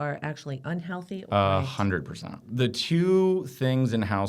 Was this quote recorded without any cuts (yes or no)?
no